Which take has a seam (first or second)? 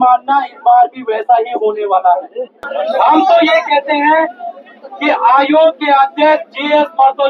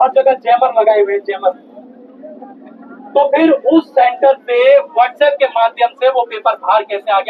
first